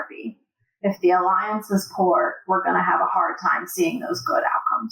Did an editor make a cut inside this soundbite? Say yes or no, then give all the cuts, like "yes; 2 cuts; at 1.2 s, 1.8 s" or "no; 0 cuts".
no; 0 cuts